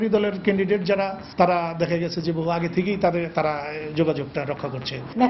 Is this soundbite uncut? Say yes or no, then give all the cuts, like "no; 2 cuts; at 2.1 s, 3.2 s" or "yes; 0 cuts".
yes; 0 cuts